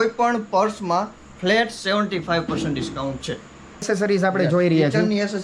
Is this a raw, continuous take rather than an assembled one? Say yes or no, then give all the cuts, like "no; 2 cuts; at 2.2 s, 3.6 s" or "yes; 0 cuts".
yes; 0 cuts